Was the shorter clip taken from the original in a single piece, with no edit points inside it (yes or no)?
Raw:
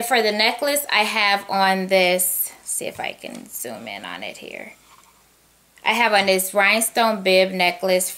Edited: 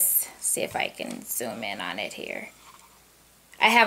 yes